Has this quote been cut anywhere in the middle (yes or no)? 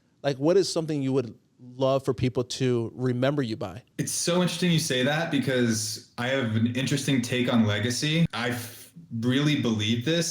yes